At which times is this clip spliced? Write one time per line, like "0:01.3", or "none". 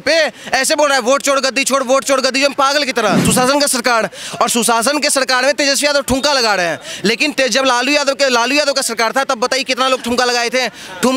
0:03.3